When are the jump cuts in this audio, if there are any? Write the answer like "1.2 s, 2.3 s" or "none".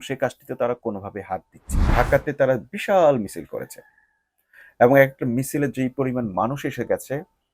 1.8 s